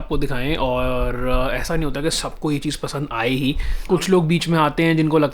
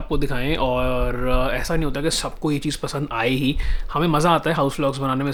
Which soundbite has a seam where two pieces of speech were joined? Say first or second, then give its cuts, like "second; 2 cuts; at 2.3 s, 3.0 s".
first; 1 cut; at 3.7 s